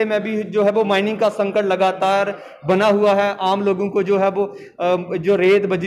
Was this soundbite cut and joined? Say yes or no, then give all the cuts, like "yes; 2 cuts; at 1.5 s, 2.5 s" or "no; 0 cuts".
no; 0 cuts